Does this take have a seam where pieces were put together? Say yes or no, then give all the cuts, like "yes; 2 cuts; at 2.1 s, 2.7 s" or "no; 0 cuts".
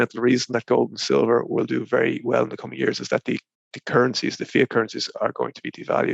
no; 0 cuts